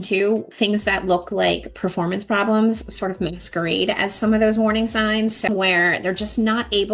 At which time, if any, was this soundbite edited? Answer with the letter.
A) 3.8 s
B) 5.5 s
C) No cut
B